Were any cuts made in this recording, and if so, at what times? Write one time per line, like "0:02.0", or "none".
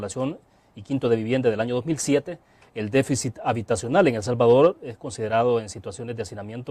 0:04.2